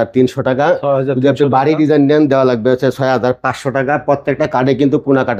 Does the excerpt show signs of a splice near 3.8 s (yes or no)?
no